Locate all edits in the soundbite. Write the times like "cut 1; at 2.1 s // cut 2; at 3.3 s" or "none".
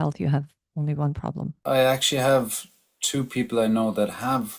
cut 1; at 1.6 s